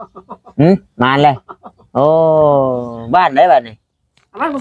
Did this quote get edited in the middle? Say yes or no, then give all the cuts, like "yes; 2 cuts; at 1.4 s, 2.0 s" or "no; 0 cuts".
no; 0 cuts